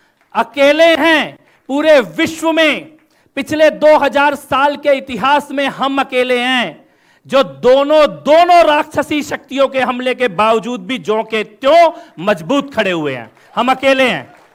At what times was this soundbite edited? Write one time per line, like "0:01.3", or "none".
none